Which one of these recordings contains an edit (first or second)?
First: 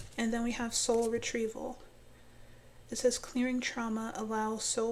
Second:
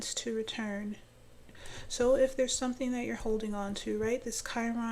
second